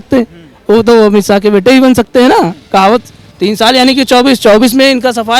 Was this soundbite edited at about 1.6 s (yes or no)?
no